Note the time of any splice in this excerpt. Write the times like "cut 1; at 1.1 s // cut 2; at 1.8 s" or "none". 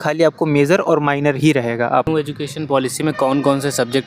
cut 1; at 2.1 s